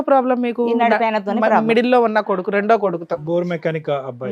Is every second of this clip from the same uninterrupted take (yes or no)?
yes